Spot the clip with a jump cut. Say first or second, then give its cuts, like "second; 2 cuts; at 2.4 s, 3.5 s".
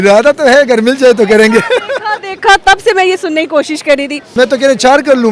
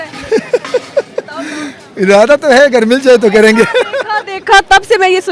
first; 1 cut; at 4.3 s